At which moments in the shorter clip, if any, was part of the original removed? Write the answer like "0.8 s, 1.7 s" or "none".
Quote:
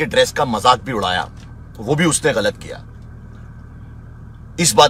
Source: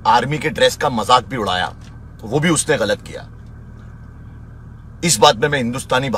none

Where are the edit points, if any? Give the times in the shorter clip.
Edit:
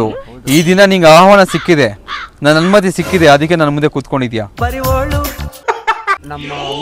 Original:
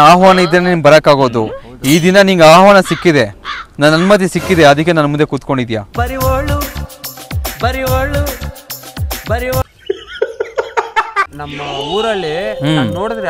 5.6 s

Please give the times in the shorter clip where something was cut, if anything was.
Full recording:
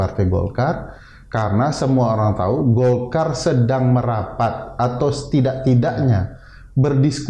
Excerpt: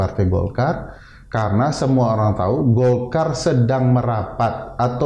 none

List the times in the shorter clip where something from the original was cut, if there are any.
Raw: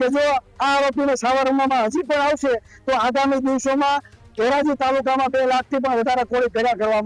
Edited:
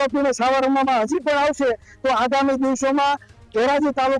none

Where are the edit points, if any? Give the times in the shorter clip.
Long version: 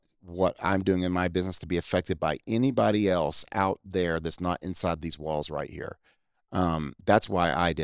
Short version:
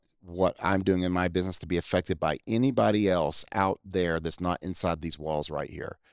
none

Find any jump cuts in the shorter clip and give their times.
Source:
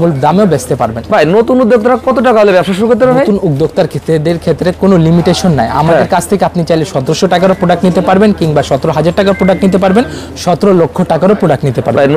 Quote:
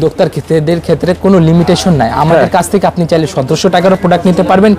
none

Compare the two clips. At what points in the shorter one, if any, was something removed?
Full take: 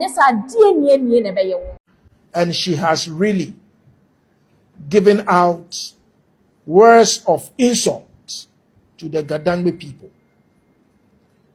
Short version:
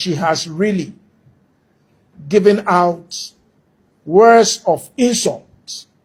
none

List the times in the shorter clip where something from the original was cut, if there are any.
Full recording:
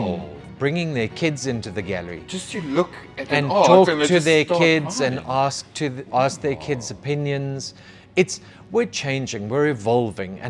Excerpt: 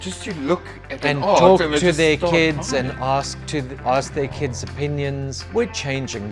5.4 s

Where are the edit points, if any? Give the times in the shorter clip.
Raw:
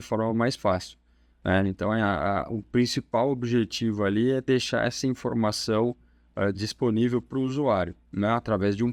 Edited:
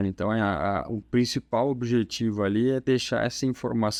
none

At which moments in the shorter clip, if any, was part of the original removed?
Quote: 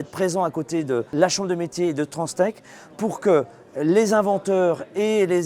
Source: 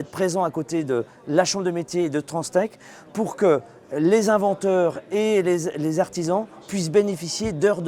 1.1 s

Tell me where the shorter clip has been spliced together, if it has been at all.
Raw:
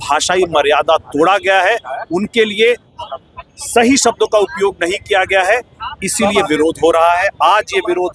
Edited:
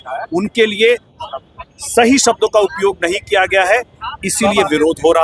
none

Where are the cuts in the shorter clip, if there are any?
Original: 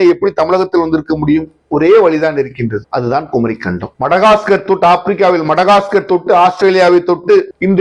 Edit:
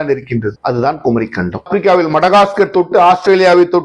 1.7 s

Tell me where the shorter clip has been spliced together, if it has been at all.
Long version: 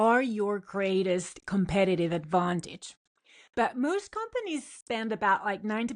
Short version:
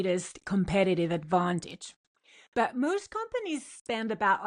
none

